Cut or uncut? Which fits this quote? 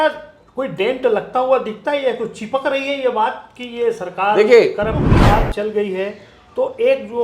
cut